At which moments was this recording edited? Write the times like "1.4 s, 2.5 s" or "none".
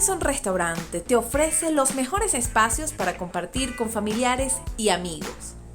none